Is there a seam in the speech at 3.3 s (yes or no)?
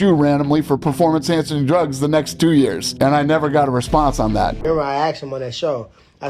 no